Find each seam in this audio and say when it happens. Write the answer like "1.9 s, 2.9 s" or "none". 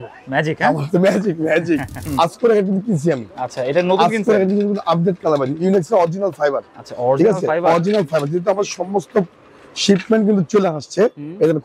2.0 s

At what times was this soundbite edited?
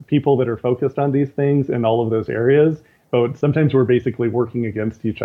none

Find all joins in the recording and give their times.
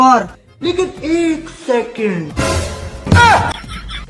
none

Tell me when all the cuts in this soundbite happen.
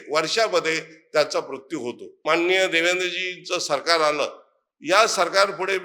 2.2 s

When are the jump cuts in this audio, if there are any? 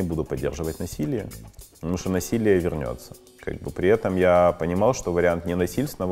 none

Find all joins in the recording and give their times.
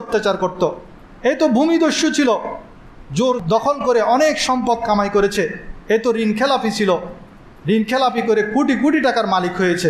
3.4 s

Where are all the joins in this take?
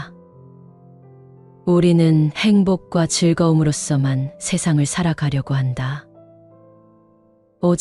none

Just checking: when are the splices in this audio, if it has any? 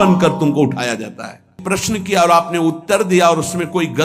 1.6 s

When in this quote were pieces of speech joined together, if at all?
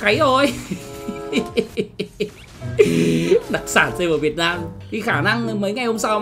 4.7 s

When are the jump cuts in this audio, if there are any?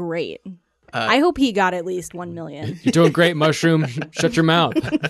none

